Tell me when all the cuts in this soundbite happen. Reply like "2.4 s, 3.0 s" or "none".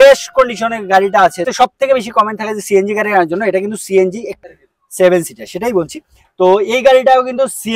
1.4 s, 4.4 s